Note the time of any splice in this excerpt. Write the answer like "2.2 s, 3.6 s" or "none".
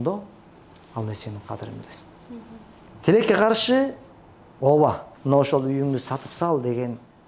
2.8 s, 5.1 s